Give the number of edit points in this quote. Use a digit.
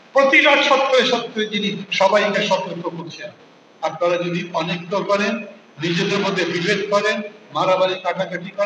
0